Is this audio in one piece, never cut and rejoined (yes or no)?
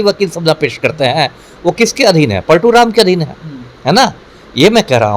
yes